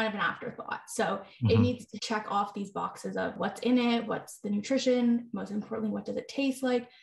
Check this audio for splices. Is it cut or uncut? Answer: cut